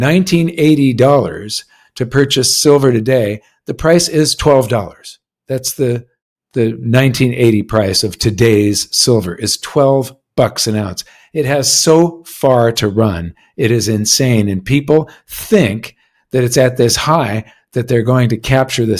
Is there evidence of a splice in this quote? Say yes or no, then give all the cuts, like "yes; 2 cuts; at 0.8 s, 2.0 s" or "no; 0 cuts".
no; 0 cuts